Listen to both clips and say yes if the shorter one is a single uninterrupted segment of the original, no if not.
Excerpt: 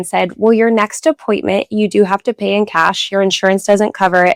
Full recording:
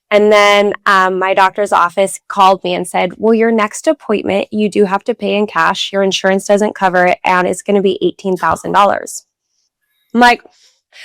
yes